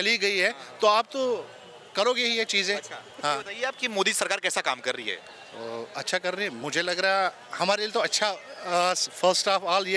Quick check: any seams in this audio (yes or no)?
no